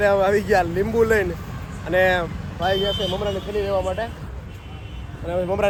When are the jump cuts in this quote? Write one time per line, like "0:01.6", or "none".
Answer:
none